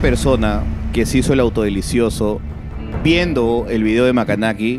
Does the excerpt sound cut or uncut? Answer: uncut